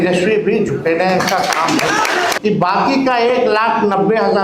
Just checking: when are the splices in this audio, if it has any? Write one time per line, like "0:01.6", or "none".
0:02.4